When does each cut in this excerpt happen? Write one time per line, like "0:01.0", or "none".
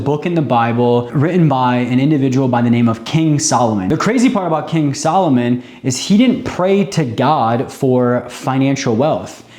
0:01.1
0:03.8